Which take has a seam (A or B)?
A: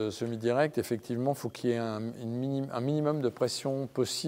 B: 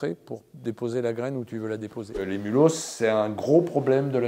B